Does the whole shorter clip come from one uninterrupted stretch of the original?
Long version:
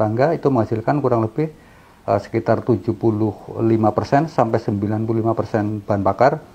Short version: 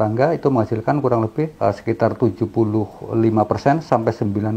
no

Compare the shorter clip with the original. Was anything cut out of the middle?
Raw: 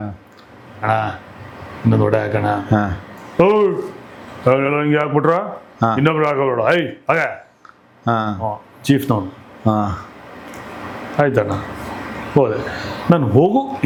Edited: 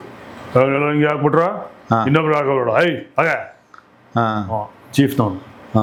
no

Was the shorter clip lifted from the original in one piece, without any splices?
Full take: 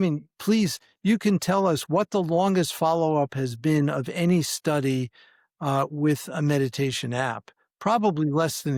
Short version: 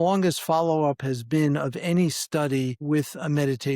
no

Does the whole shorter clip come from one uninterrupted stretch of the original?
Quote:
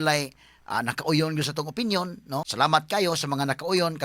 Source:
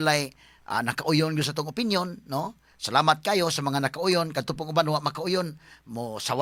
no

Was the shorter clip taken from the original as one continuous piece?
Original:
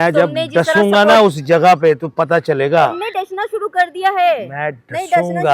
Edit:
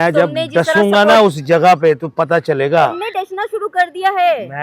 yes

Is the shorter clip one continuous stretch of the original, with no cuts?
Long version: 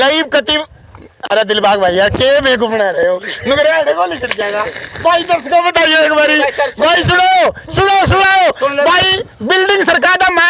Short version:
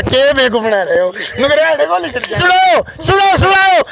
no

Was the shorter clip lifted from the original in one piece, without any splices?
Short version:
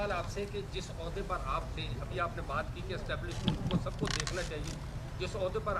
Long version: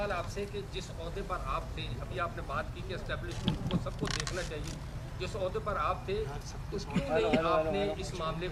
yes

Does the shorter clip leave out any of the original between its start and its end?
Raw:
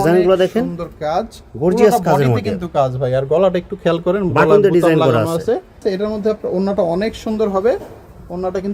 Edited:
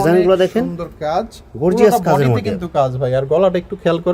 no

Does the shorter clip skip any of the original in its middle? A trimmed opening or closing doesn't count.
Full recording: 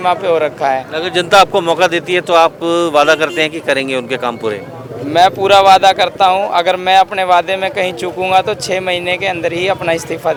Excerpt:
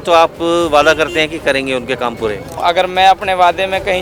yes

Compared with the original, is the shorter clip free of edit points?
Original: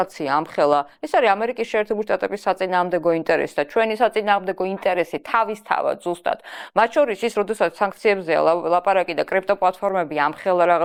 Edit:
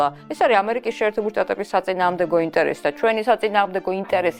yes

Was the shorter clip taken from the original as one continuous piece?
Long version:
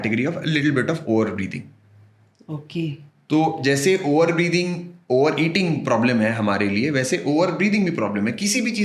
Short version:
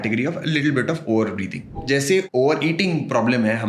no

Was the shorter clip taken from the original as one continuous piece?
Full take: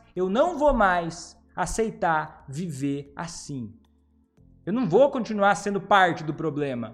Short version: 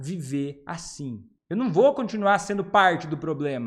no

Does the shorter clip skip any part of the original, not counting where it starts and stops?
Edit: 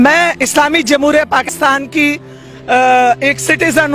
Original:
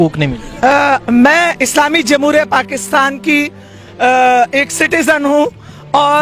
yes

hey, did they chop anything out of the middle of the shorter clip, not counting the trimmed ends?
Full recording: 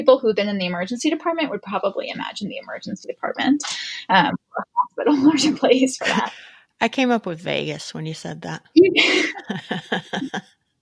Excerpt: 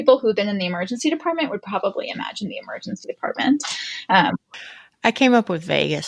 yes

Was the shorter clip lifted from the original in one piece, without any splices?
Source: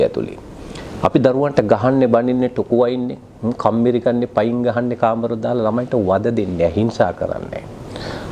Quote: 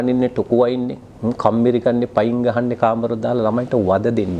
yes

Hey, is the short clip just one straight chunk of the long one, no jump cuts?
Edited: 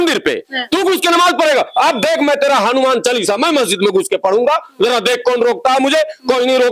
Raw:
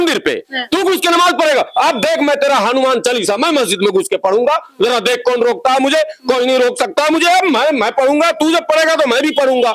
yes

